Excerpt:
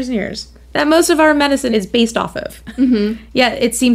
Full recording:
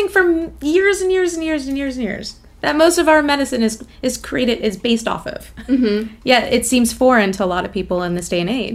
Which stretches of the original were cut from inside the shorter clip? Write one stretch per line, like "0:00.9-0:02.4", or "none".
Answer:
0:03.6-0:04.6